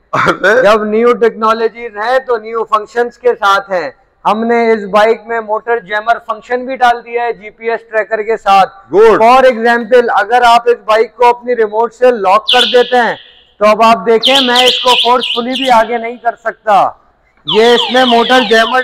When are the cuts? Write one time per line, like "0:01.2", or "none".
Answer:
none

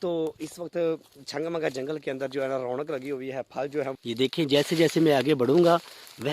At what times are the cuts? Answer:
0:04.0

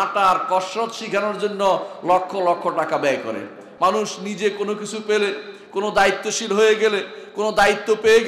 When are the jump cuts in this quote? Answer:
0:03.6

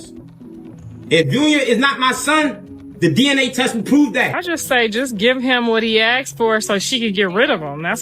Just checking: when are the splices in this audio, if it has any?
0:04.1

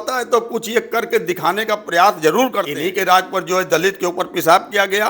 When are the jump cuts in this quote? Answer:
0:02.7

